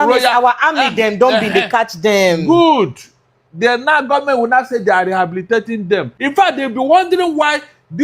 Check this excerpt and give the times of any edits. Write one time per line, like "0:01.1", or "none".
0:06.2